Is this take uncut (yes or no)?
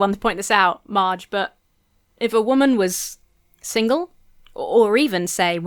yes